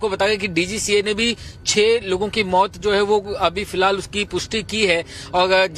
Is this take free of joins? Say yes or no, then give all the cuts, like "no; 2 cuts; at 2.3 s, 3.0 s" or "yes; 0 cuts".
yes; 0 cuts